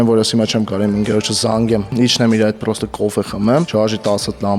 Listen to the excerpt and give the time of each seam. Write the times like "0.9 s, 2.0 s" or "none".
1.9 s, 3.7 s